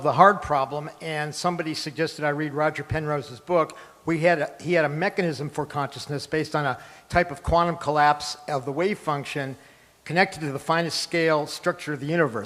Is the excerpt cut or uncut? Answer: cut